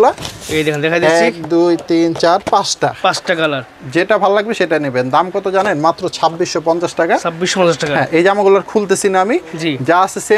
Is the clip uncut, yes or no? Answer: yes